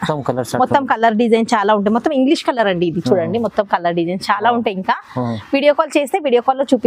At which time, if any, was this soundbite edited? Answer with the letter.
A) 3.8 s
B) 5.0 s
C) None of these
C